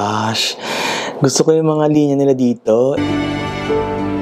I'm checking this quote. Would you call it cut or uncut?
cut